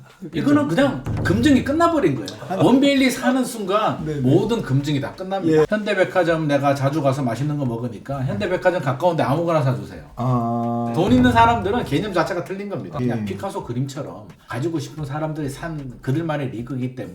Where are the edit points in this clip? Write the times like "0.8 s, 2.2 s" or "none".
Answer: 5.7 s, 12.9 s